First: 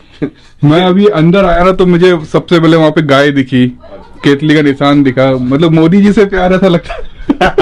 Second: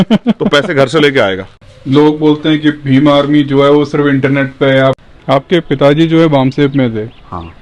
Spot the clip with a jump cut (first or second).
second